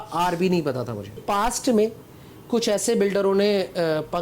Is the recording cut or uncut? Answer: cut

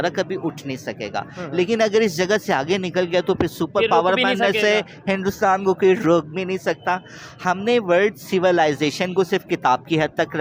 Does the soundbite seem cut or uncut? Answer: uncut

